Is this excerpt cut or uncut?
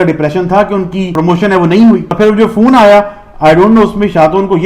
cut